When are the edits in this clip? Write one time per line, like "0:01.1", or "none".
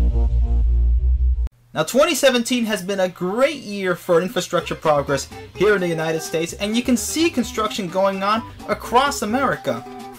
none